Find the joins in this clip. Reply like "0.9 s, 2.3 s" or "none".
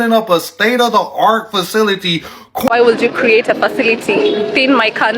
2.7 s